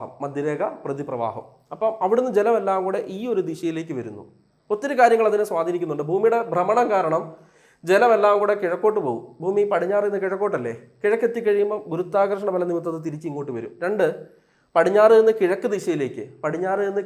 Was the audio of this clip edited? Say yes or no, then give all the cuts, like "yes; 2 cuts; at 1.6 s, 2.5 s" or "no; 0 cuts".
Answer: no; 0 cuts